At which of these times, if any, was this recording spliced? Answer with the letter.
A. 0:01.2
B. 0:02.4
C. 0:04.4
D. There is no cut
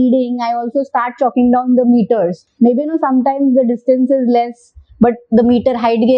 B